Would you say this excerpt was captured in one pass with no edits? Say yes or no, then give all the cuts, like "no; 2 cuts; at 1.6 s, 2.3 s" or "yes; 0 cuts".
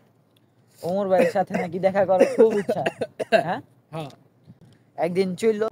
yes; 0 cuts